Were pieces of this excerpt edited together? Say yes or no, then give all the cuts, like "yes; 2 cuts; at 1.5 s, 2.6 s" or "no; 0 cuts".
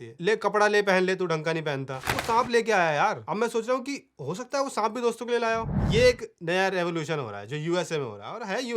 yes; 1 cut; at 5.7 s